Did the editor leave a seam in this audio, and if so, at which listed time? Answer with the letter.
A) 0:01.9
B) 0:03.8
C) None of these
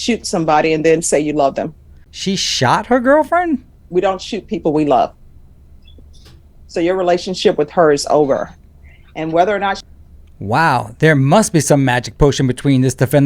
B